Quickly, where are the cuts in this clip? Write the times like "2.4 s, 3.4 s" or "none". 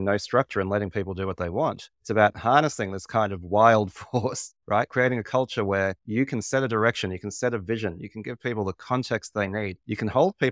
none